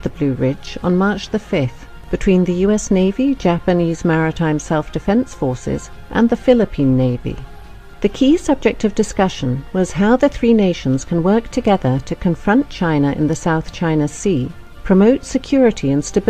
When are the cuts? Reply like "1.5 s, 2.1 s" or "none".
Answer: 5.6 s